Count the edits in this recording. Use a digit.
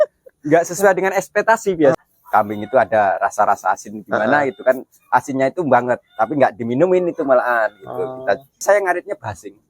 2